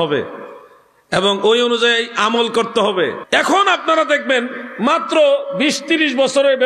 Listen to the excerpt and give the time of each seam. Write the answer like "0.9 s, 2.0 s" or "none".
3.2 s